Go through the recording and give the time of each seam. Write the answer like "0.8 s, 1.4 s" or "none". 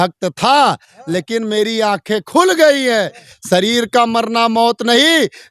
3.3 s